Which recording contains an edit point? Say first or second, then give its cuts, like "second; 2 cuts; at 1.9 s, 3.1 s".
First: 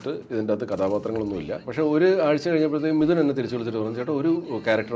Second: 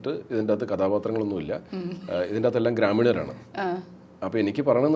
first; 1 cut; at 1.7 s